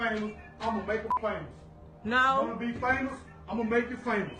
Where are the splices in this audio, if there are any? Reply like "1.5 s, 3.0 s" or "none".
1.1 s